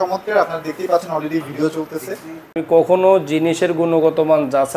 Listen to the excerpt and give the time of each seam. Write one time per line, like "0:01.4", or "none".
0:02.6